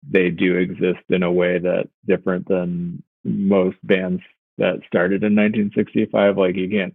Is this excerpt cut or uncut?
uncut